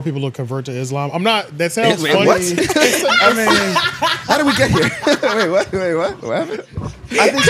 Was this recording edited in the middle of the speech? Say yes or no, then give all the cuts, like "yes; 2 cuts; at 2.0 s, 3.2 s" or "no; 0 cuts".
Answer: no; 0 cuts